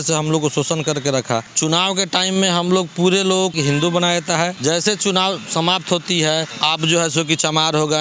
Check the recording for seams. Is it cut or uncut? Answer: cut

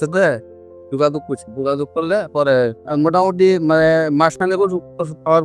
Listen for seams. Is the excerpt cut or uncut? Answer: cut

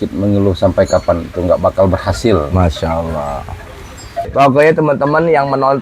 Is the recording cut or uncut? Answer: cut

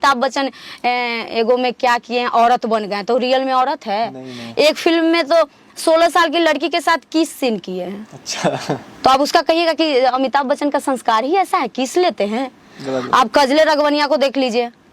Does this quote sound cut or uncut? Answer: uncut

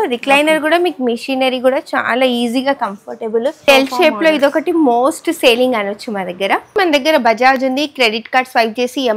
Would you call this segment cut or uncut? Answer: cut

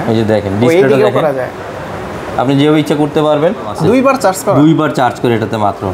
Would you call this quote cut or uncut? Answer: cut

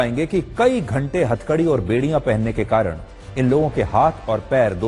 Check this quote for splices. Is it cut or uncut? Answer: uncut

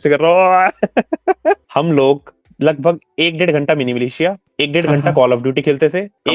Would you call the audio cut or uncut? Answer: cut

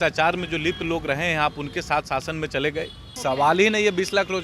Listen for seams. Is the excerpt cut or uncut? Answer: cut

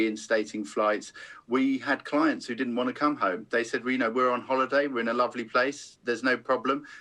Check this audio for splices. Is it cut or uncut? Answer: uncut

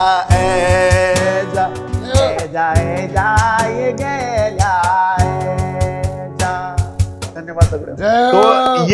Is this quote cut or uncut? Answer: uncut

